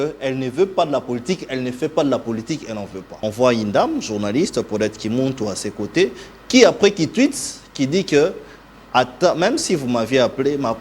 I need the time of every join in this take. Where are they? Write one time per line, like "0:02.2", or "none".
0:03.0